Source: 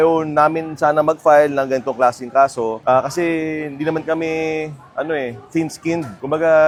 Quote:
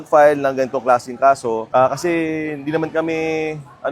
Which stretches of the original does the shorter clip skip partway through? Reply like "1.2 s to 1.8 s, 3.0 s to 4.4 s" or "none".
none